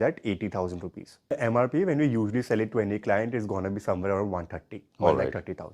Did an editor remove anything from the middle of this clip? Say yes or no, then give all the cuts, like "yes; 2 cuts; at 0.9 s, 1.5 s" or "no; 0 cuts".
yes; 1 cut; at 1.3 s